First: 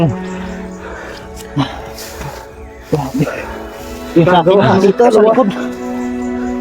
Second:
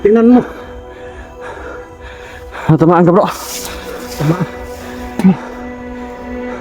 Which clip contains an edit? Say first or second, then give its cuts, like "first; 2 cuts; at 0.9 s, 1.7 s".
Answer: first; 1 cut; at 5.5 s